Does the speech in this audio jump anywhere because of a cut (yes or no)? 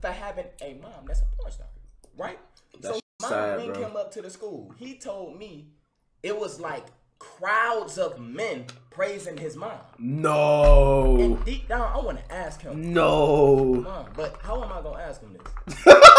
no